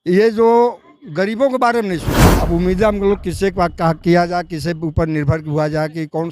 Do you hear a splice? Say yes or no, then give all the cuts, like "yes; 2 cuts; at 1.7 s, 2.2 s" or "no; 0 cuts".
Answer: yes; 1 cut; at 2.3 s